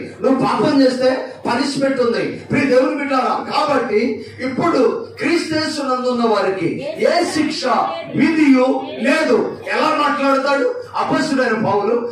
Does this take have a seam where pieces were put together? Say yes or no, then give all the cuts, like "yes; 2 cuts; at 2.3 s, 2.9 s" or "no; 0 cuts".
no; 0 cuts